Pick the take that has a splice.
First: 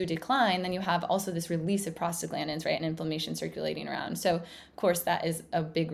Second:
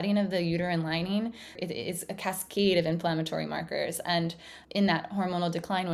second; 2 cuts; at 1.6 s, 4.6 s

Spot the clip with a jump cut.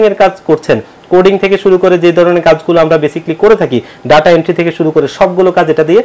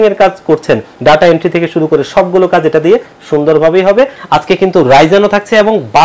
second; 2 cuts; at 0.9 s, 4.2 s

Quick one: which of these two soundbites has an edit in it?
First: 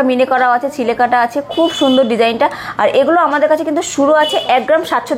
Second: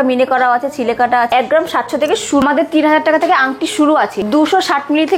second; 2 cuts; at 1.3 s, 2.4 s

